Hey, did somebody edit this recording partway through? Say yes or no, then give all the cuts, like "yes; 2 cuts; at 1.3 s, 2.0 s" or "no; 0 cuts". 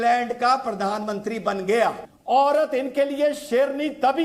yes; 1 cut; at 2.1 s